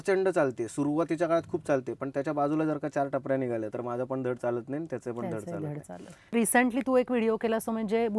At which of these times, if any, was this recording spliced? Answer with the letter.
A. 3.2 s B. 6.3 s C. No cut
B